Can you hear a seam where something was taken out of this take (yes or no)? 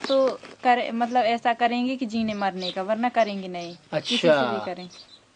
no